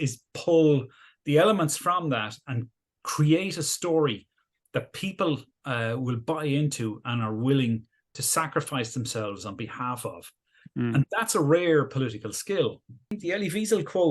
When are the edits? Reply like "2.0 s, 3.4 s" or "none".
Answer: 13.1 s